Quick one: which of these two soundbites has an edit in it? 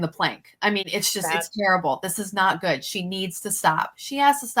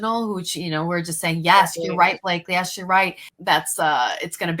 second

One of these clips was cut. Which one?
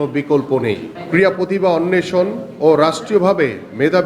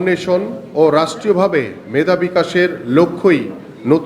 first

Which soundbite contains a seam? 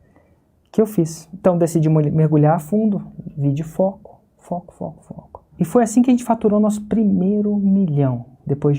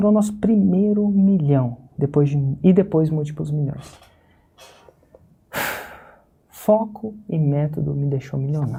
first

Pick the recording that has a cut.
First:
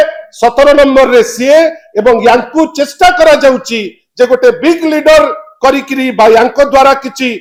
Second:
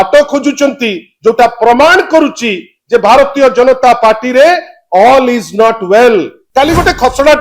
second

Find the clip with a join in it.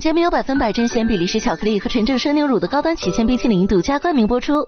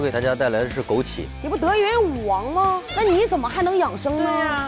second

